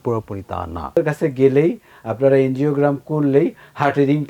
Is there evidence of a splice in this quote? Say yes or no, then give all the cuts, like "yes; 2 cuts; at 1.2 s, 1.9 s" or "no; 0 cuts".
yes; 1 cut; at 1.0 s